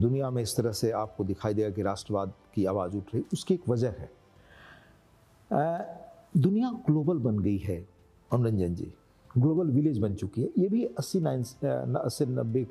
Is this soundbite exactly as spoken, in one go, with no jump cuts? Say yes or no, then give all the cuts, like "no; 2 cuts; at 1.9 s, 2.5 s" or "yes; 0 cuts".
yes; 0 cuts